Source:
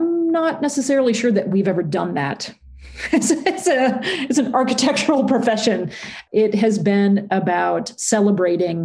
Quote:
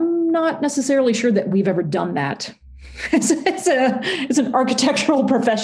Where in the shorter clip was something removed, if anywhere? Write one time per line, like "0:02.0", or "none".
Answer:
none